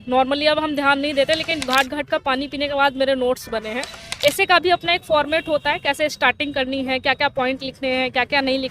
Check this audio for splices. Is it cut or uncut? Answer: cut